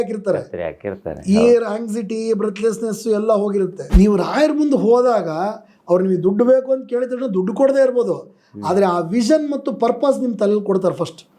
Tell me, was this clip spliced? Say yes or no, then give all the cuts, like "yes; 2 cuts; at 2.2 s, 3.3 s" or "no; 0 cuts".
yes; 1 cut; at 3.8 s